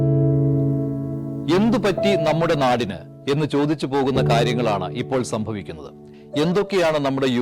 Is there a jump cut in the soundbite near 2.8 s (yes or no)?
yes